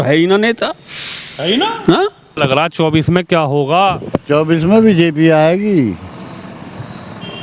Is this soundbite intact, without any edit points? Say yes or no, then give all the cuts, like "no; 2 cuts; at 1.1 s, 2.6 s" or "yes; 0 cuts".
no; 1 cut; at 2.3 s